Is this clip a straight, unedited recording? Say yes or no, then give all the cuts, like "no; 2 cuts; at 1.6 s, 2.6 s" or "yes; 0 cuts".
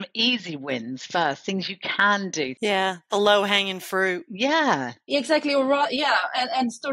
yes; 0 cuts